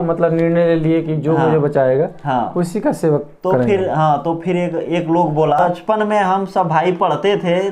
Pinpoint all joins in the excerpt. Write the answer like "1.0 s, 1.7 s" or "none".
5.6 s